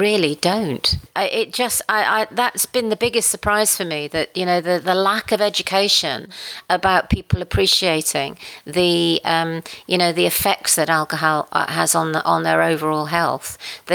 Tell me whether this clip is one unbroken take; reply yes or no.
no